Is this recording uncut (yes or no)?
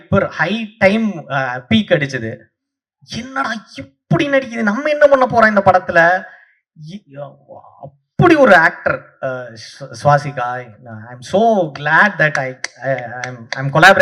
yes